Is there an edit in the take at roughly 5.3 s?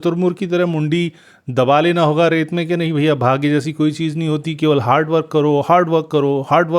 no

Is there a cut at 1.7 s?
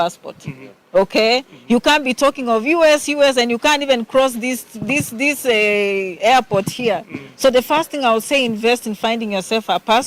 no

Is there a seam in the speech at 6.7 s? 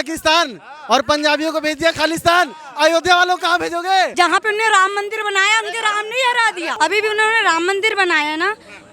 yes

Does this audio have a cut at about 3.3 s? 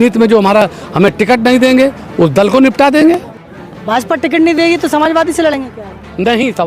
yes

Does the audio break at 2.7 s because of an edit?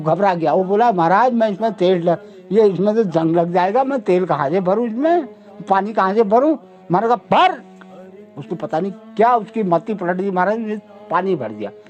no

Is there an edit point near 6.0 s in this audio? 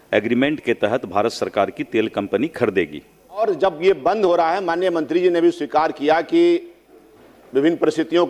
no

